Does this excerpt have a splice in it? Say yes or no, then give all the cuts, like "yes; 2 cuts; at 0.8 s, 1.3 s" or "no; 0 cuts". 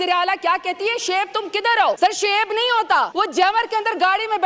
yes; 2 cuts; at 2.0 s, 3.1 s